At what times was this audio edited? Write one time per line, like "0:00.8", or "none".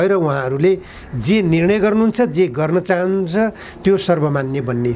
none